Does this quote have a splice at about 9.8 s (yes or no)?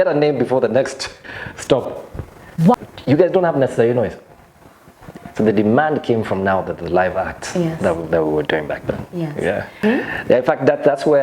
yes